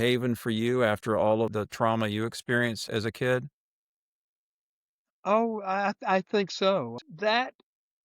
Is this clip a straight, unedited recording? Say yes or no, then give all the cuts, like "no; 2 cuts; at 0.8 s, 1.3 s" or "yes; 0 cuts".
no; 3 cuts; at 1.5 s, 2.8 s, 7.0 s